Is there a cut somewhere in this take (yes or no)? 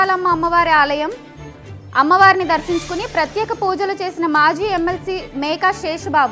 no